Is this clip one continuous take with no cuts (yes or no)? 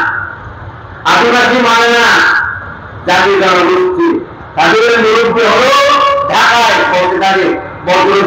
yes